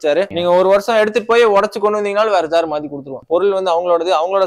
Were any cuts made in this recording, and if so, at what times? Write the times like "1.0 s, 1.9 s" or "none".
3.2 s